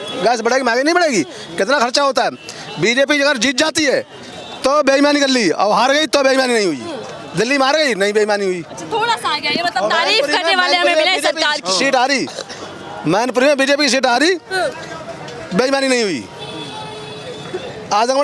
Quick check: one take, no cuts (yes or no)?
yes